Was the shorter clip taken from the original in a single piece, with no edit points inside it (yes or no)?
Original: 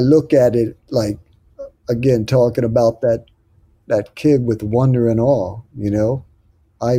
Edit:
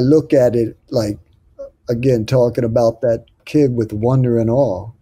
no